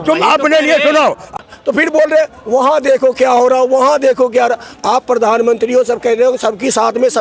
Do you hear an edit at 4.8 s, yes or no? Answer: no